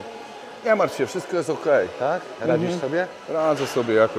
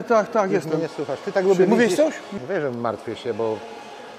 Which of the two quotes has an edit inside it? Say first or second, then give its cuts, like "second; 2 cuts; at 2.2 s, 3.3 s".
second; 1 cut; at 2.3 s